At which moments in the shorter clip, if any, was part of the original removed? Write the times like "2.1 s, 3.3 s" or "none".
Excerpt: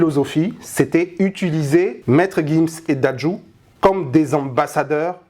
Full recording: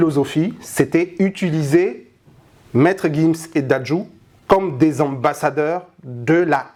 2.0 s